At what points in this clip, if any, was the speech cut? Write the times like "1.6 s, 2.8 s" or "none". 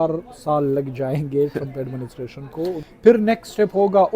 2.8 s